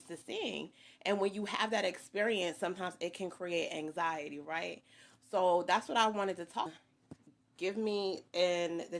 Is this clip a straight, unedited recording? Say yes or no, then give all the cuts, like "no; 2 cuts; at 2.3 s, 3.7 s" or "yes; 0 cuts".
yes; 0 cuts